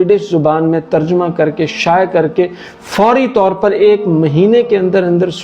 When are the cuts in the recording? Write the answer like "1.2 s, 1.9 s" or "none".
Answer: none